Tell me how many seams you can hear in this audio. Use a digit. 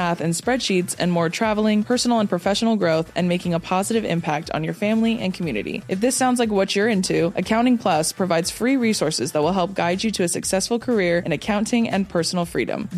0